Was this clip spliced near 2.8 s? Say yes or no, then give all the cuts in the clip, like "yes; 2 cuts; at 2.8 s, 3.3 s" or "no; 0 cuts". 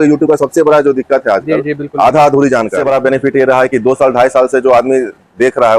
yes; 1 cut; at 2.8 s